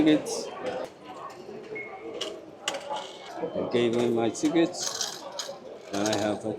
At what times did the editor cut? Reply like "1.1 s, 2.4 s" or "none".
0.8 s, 3.2 s

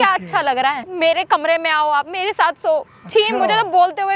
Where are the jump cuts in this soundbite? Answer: 0.9 s

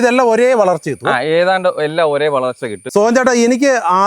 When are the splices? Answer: 2.8 s

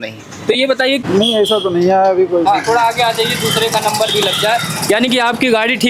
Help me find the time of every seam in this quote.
1.0 s

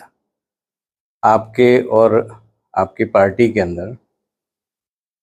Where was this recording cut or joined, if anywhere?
none

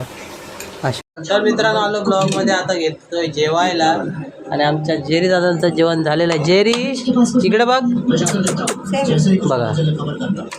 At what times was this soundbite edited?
0.9 s

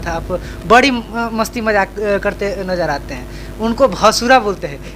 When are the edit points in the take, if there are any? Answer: none

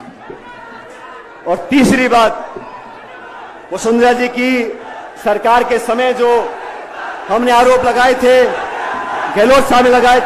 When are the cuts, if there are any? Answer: none

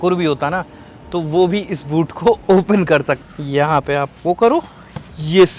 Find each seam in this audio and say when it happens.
3.1 s

